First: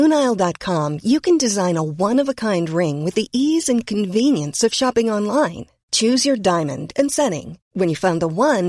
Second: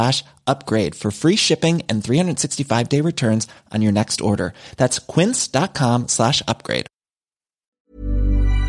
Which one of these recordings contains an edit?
second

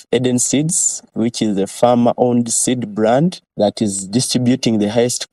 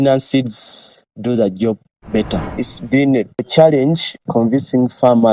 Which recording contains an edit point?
second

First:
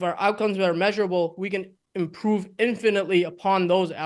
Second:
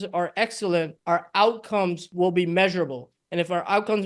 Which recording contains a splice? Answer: second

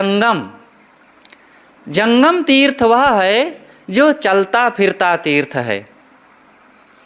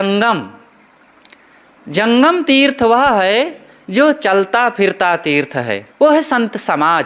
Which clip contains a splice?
second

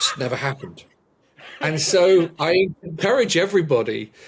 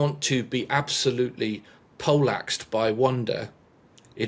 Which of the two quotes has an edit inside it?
first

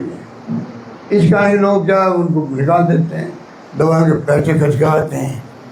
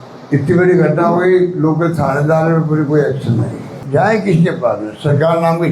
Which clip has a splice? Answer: second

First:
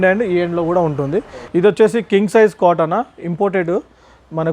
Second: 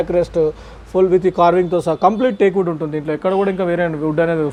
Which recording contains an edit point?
first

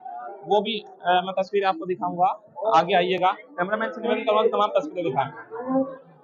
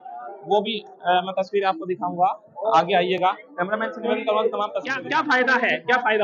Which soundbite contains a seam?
second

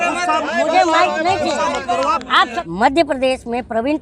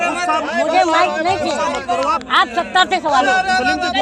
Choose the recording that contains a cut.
first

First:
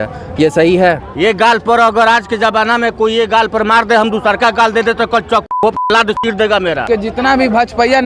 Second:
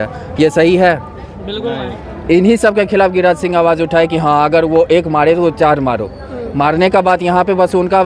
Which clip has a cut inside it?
first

